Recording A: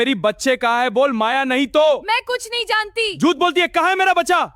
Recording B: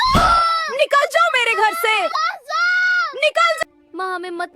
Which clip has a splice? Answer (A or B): B